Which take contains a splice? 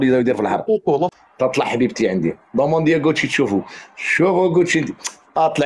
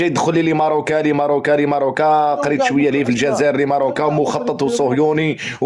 first; 1 cut; at 1.1 s

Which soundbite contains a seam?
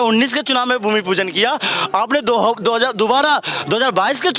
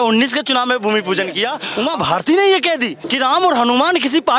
second; 2 cuts; at 1.6 s, 3.0 s

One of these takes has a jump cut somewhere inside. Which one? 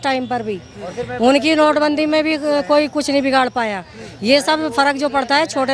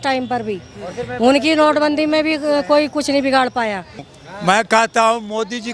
second; 1 cut; at 4.1 s

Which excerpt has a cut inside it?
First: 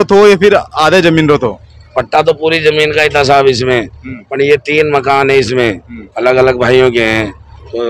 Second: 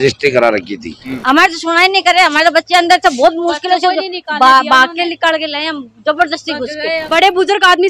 second; 2 cuts; at 1.1 s, 7.0 s

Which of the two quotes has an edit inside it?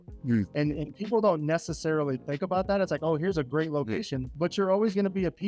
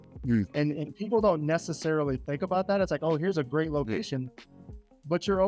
first; 1 cut; at 4.2 s

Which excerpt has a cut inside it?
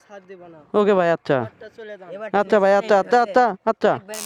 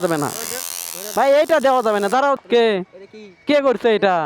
second; 1 cut; at 2.4 s

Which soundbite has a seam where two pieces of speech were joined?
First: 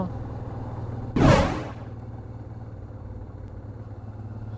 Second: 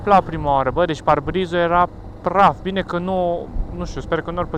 first; 1 cut; at 3.5 s

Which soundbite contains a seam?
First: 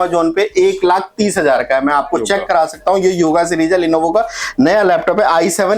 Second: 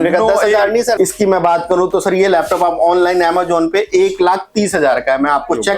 second; 1 cut; at 1.0 s

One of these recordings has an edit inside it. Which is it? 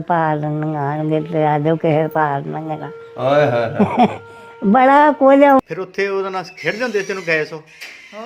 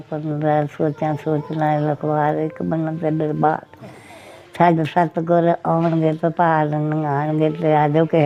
first; 1 cut; at 5.6 s

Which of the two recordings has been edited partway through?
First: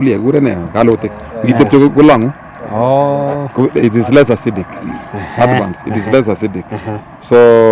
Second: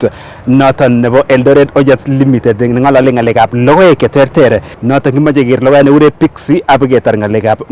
second; 1 cut; at 4.7 s

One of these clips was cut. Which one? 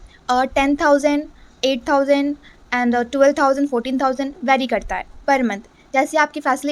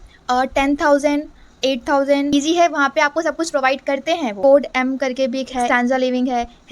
second; 3 cuts; at 2.3 s, 4.4 s, 5.7 s

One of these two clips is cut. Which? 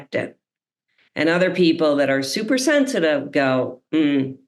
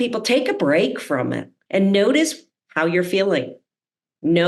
second; 1 cut; at 1.6 s

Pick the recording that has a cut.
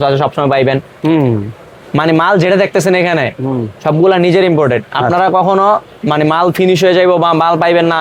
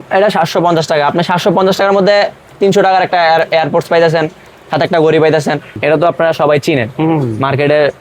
second; 1 cut; at 5.7 s

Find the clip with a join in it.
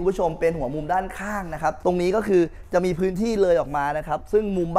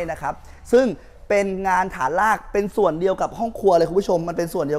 first; 1 cut; at 1.8 s

